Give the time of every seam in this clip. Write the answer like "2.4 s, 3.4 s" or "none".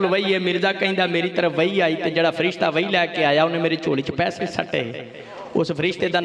none